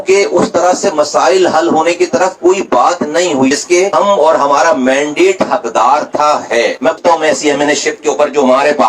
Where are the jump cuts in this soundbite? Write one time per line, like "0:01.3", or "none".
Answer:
0:03.5
0:07.0